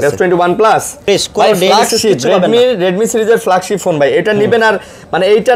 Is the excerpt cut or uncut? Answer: cut